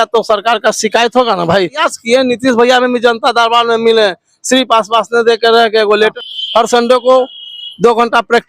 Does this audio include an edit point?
yes; 2 cuts; at 1.8 s, 6.2 s

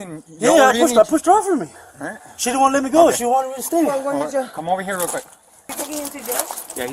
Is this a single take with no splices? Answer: no; 1 cut; at 5.7 s

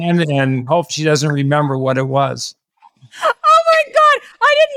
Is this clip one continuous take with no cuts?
yes; 0 cuts

